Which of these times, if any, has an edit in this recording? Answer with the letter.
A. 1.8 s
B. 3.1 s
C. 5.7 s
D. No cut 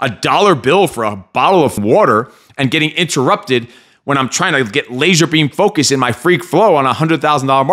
A